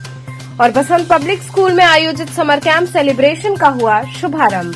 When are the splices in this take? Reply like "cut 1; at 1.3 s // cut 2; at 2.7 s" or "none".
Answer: none